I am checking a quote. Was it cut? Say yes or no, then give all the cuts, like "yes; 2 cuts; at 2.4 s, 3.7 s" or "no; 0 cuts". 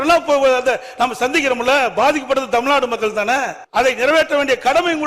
yes; 1 cut; at 3.6 s